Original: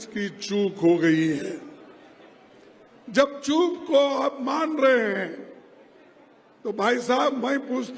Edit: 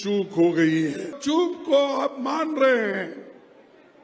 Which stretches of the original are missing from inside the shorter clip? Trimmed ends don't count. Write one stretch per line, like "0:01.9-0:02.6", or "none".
0:01.6-0:03.4